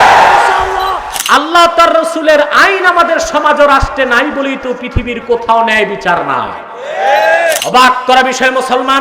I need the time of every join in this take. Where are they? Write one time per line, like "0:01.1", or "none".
0:01.1
0:07.6